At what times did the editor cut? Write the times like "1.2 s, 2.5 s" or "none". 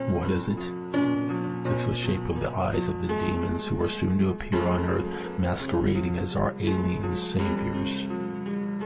3.6 s